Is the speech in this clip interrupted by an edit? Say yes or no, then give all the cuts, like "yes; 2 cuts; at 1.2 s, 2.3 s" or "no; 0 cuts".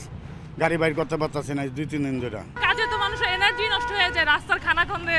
yes; 1 cut; at 2.5 s